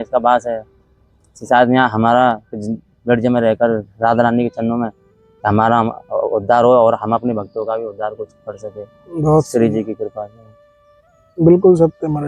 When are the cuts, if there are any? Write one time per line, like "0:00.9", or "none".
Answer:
none